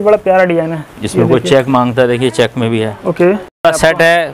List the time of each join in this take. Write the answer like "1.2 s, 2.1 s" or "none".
3.4 s